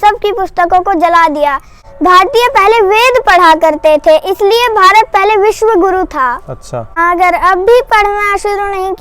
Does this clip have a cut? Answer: yes; 2 cuts; at 2.0 s, 6.9 s

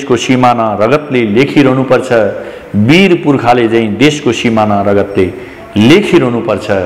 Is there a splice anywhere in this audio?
no; 0 cuts

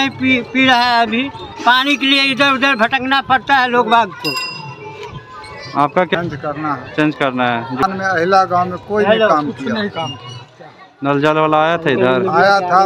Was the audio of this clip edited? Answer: no; 0 cuts

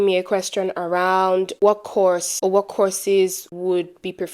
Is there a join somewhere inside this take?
yes; 3 cuts; at 1.5 s, 2.3 s, 3.5 s

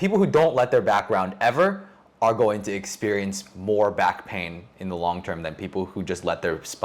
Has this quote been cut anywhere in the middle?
no; 0 cuts

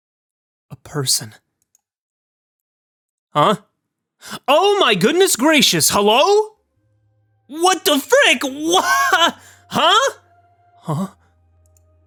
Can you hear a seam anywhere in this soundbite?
no; 0 cuts

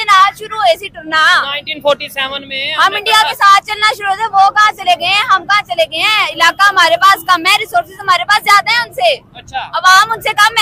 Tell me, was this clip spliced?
no; 0 cuts

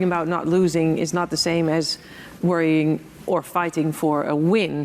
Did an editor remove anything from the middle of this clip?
no; 0 cuts

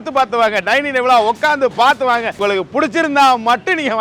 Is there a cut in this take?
yes; 1 cut; at 2.4 s

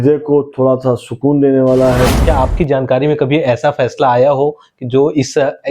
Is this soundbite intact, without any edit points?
no; 1 cut; at 2.2 s

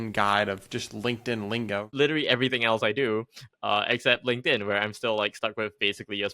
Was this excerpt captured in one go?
no; 1 cut; at 1.9 s

